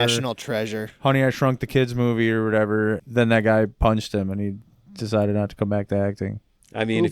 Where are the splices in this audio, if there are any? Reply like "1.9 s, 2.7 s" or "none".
3.0 s